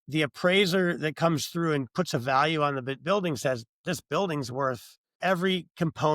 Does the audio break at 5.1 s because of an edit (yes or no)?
yes